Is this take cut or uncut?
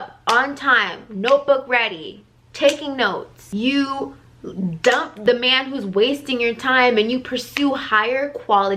cut